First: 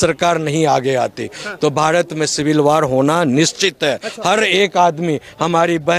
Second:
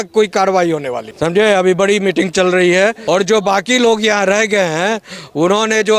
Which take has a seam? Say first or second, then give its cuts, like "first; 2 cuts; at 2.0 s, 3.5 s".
second; 2 cuts; at 1.1 s, 3.0 s